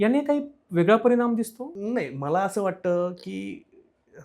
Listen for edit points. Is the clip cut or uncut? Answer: cut